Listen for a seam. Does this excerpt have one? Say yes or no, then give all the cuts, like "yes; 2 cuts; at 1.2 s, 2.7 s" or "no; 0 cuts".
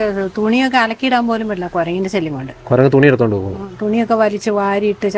no; 0 cuts